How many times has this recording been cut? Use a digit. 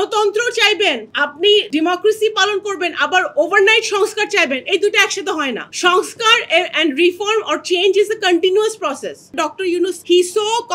2